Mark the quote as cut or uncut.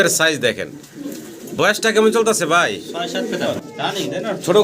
cut